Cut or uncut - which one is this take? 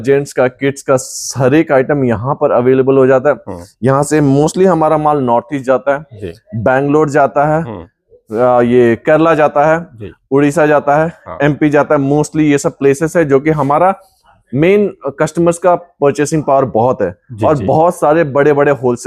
uncut